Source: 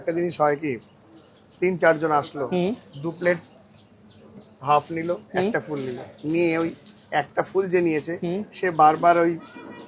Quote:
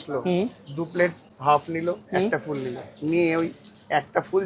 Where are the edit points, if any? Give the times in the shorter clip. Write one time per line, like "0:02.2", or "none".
0:01.3